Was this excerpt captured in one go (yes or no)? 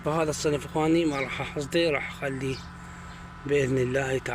yes